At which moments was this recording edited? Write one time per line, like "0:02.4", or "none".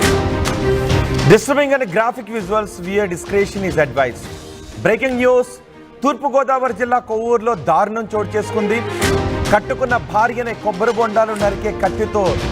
0:01.0